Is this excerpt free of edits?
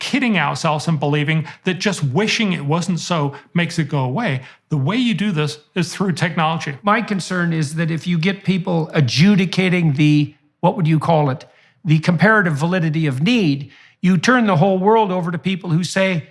no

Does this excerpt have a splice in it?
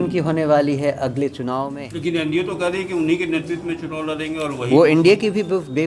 yes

